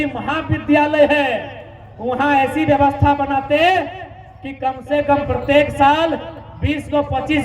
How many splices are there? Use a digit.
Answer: 0